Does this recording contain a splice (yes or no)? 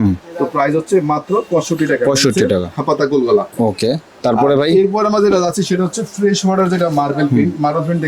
no